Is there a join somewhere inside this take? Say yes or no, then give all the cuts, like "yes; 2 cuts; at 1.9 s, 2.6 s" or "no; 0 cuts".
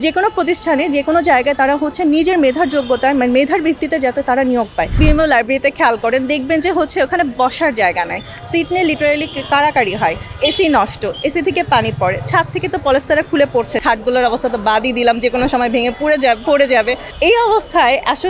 yes; 3 cuts; at 5.0 s, 13.8 s, 17.1 s